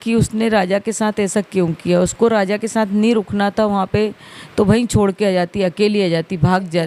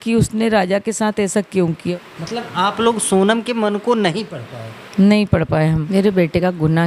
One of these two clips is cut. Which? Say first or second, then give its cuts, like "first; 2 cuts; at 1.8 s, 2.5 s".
second; 2 cuts; at 1.8 s, 5.8 s